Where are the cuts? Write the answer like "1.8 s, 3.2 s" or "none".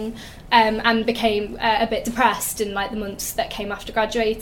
none

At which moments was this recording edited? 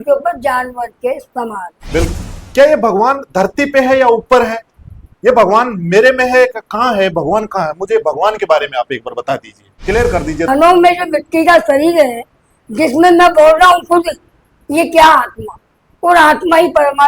2.1 s, 10.5 s

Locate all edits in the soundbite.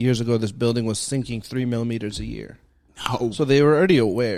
none

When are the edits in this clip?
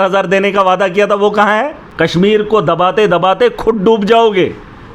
1.9 s

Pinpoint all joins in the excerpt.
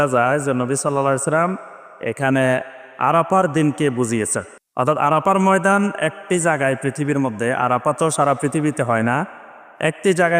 none

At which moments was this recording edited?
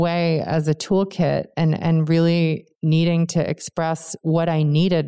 none

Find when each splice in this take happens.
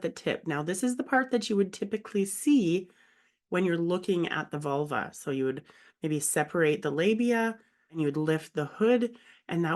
7.9 s

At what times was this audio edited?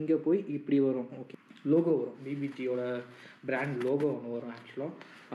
1.2 s

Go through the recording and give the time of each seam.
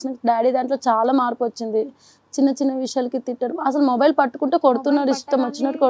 none

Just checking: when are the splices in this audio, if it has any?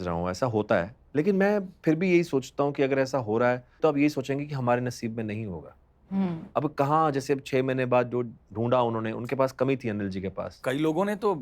1.0 s, 3.8 s

